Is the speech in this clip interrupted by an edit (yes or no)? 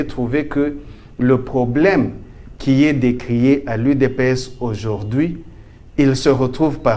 no